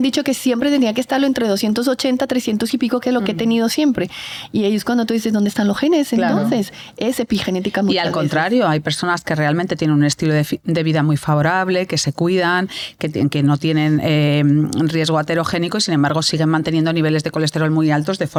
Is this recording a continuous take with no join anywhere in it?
yes; 0 cuts

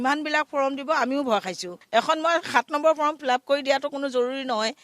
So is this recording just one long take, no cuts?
no; 1 cut; at 1.8 s

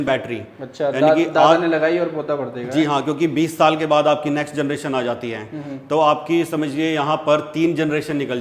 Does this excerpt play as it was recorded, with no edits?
yes; 0 cuts

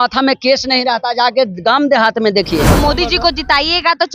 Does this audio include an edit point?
yes; 1 cut; at 2.8 s

